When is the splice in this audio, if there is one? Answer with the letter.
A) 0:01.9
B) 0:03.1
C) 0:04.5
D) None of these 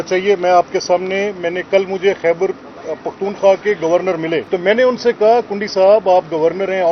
C